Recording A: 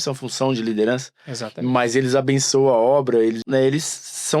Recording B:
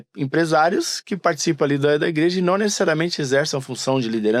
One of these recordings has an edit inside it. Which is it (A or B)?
A